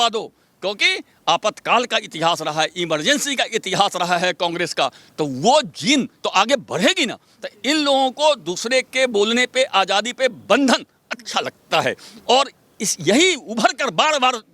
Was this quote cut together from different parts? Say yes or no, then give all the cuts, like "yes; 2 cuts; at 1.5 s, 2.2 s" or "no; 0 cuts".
no; 0 cuts